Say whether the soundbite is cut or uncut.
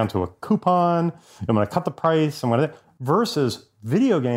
uncut